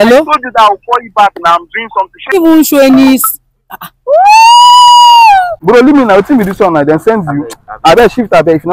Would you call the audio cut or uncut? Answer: cut